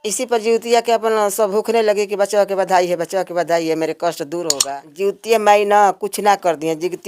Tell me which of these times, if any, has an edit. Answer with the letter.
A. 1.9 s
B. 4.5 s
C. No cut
B